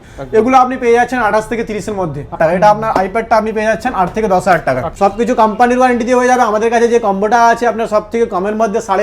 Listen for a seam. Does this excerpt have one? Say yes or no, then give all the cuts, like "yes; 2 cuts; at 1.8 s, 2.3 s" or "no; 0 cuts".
yes; 2 cuts; at 2.3 s, 4.9 s